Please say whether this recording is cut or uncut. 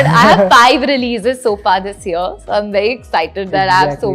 uncut